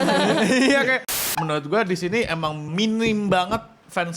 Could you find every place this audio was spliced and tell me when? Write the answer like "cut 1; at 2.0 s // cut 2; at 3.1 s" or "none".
cut 1; at 1.2 s // cut 2; at 2.7 s